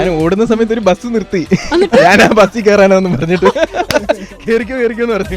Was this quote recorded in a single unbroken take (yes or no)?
yes